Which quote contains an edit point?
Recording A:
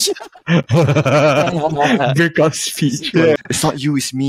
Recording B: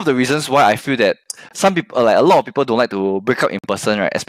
A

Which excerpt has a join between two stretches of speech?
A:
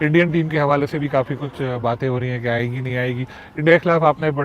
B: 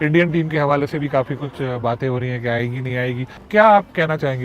B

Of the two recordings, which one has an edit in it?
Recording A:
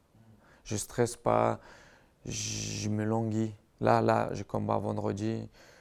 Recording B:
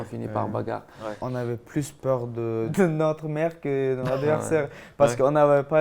B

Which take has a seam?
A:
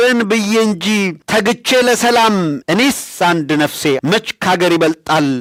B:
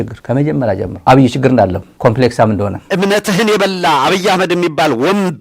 B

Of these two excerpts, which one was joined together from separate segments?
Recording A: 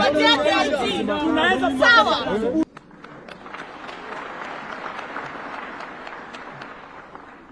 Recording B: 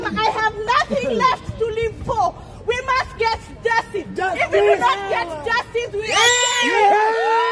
A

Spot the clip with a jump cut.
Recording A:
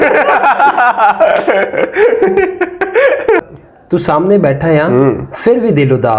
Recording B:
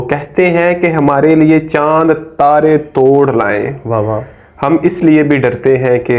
A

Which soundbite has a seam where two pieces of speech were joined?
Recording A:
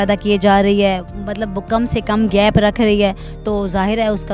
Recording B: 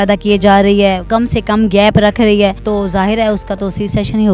B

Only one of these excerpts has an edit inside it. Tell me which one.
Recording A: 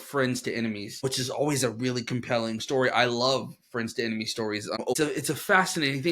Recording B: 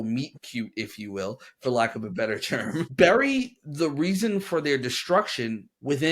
A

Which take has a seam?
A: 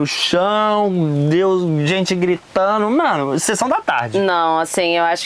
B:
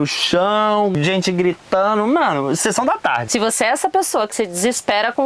B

